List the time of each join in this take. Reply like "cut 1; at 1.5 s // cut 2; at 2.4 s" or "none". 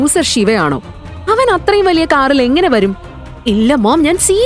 none